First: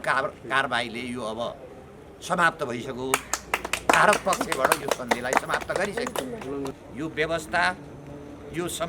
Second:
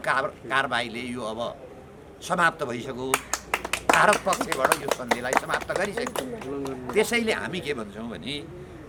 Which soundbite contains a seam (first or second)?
first